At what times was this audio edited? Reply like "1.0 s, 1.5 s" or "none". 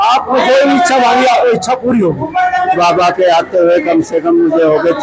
2.8 s